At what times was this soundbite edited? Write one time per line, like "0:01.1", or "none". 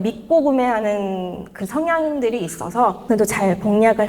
0:03.0